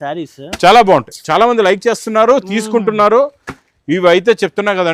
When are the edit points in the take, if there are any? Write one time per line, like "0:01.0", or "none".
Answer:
none